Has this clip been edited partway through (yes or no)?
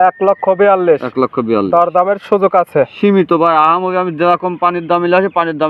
no